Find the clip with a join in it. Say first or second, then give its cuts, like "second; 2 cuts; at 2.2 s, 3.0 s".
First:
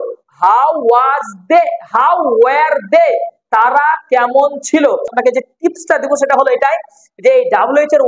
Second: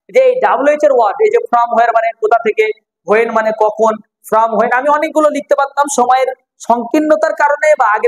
first; 1 cut; at 5.1 s